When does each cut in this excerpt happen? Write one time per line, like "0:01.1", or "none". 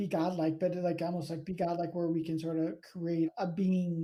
none